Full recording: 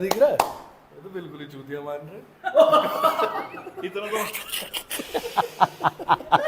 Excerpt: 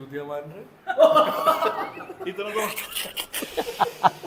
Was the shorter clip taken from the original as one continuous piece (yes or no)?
yes